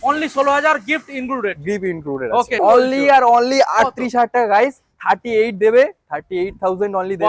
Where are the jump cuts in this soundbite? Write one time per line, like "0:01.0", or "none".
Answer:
0:02.6